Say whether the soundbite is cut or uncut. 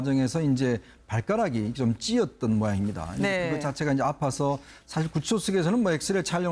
uncut